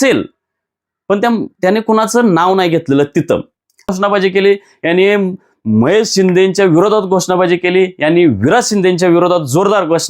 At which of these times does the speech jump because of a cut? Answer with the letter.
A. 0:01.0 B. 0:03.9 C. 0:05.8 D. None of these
B